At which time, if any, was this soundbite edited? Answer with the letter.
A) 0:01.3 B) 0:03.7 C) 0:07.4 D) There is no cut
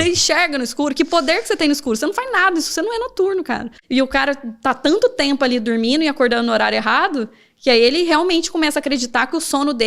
B